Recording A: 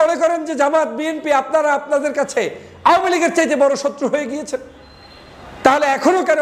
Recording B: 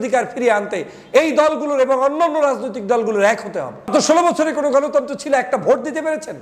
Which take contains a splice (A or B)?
B